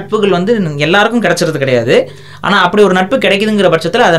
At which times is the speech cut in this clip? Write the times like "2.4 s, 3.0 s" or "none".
none